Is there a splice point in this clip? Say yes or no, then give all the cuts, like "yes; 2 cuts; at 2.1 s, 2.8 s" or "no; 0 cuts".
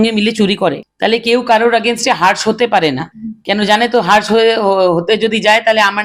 no; 0 cuts